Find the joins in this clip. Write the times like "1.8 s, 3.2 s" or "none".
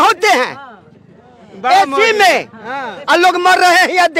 none